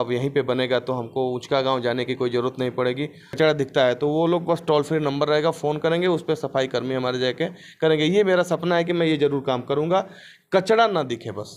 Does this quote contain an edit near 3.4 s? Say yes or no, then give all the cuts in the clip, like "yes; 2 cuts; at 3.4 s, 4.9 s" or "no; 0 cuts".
yes; 1 cut; at 3.4 s